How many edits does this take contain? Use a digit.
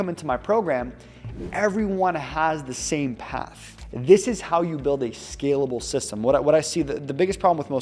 1